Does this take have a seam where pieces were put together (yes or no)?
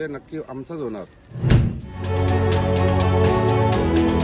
yes